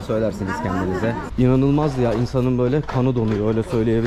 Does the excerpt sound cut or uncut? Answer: cut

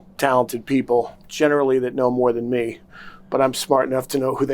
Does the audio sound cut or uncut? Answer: cut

